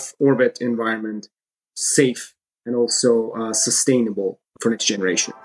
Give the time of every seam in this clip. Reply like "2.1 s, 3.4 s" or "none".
4.5 s